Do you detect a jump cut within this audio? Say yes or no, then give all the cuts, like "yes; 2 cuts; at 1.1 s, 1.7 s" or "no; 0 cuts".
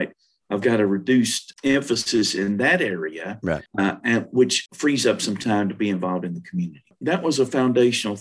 yes; 4 cuts; at 1.4 s, 3.7 s, 4.6 s, 6.9 s